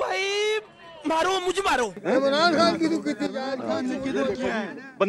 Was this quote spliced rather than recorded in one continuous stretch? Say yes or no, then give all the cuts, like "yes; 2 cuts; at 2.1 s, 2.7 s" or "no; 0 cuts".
no; 0 cuts